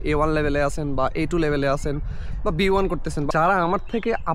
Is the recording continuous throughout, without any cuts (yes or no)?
no